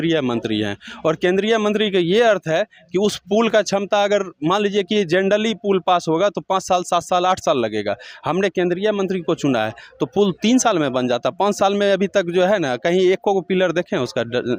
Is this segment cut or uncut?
uncut